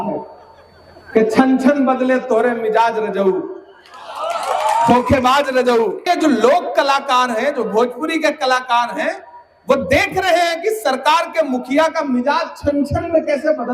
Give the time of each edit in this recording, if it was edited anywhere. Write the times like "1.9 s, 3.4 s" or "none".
6.0 s